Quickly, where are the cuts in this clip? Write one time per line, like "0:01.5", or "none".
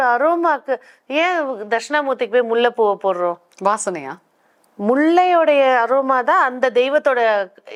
none